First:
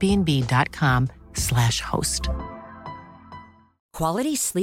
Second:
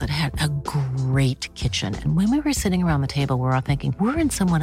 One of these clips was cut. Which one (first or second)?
first